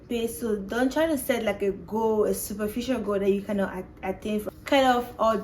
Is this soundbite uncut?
no; 1 cut; at 4.4 s

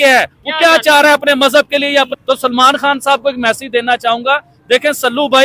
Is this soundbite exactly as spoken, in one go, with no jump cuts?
no; 1 cut; at 2.1 s

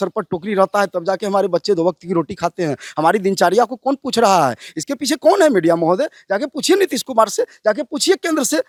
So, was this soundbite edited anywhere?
no; 0 cuts

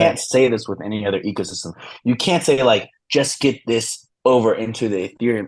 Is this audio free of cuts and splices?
yes; 0 cuts

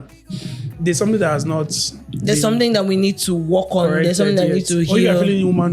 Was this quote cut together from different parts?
no; 0 cuts

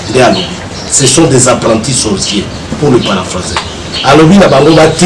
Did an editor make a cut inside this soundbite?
no; 0 cuts

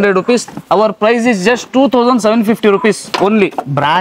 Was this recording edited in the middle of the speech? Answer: no; 0 cuts

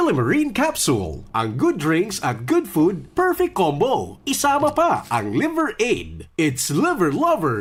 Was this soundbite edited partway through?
no; 0 cuts

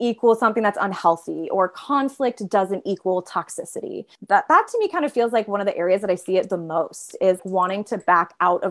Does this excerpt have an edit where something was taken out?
yes; 2 cuts; at 4.1 s, 7.4 s

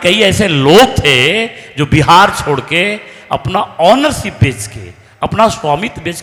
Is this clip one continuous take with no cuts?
yes; 0 cuts

